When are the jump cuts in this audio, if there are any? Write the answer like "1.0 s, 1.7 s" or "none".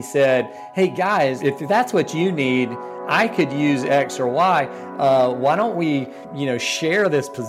1.4 s, 6.2 s